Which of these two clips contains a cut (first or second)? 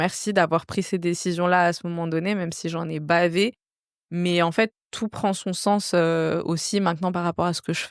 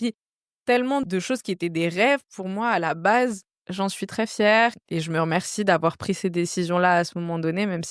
second